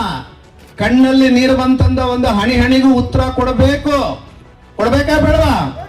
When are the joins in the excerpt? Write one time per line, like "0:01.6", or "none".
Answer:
none